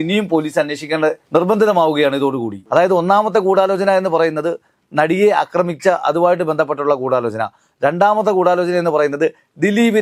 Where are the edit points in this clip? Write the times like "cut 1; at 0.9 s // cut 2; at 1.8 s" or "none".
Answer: none